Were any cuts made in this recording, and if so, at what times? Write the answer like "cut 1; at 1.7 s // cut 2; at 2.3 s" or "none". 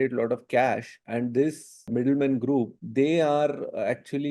cut 1; at 1.0 s // cut 2; at 1.9 s // cut 3; at 2.8 s